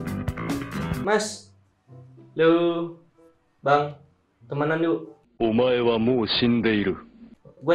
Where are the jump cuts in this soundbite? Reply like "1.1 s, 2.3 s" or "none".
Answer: 1.0 s